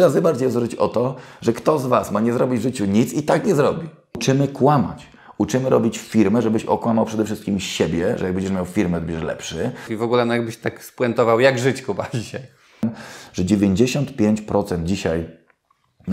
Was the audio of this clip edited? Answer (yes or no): yes